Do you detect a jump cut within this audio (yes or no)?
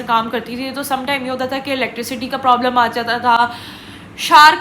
no